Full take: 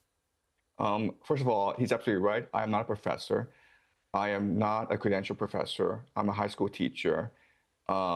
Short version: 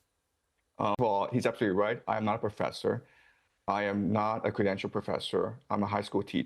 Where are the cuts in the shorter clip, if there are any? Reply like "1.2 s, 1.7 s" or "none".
1.0 s